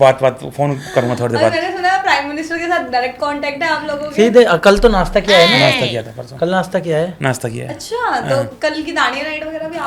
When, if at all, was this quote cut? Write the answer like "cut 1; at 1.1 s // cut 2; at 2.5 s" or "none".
none